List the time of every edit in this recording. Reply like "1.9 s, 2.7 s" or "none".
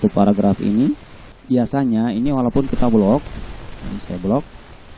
1.3 s